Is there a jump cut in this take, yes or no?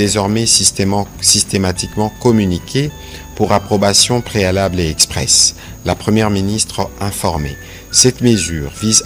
no